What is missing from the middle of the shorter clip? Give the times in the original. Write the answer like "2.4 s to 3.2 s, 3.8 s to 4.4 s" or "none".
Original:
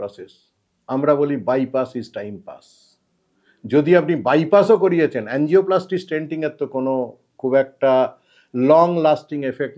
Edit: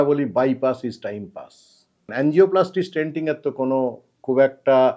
3.2 s to 5.2 s